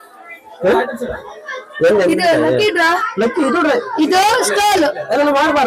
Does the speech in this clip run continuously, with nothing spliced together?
yes; 0 cuts

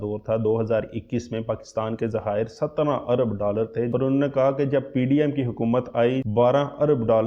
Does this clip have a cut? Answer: yes; 2 cuts; at 3.9 s, 6.2 s

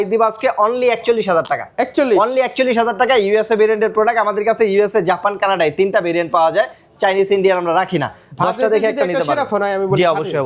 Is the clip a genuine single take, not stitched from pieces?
yes; 0 cuts

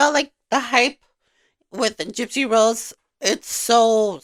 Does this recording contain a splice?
no; 0 cuts

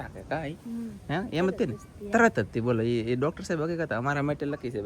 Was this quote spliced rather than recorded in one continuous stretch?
no; 0 cuts

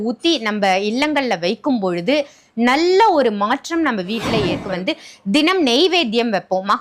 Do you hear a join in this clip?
yes; 1 cut; at 4.6 s

